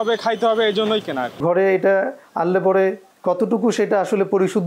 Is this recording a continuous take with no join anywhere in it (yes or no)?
no